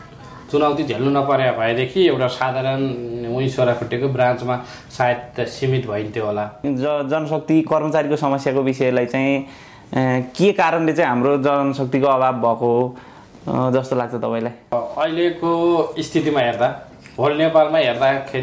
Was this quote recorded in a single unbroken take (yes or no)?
no